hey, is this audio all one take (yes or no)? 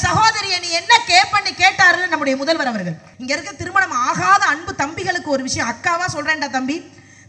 no